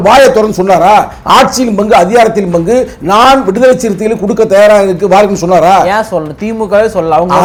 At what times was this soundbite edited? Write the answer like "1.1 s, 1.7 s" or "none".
none